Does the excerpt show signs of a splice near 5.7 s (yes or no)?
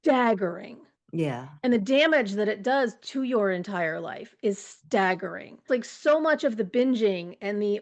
yes